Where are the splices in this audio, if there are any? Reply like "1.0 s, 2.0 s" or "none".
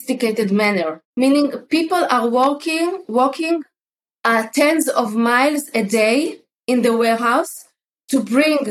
1.0 s